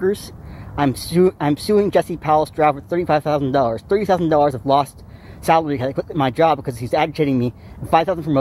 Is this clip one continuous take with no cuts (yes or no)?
no